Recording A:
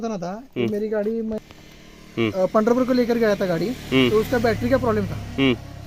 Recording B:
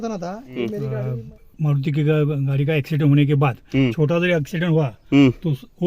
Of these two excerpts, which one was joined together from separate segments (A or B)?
B